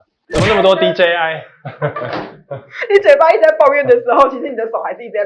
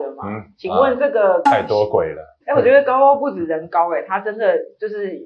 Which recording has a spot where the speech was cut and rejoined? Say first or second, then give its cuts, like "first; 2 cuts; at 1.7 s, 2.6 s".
second; 2 cuts; at 1.4 s, 2.3 s